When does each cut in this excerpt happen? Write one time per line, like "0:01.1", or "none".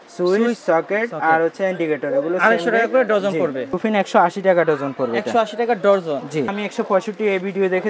0:03.7
0:06.5